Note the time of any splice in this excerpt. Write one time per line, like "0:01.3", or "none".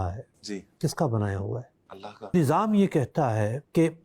0:02.3